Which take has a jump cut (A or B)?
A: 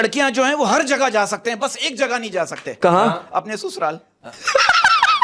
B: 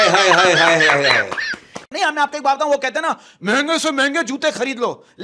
B